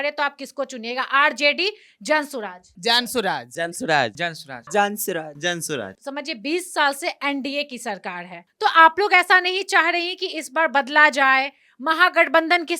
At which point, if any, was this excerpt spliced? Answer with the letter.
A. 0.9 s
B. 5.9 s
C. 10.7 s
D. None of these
B